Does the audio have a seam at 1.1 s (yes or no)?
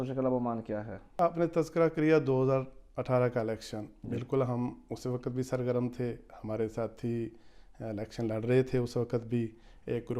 yes